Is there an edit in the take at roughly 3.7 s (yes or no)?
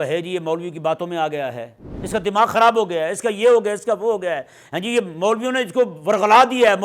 no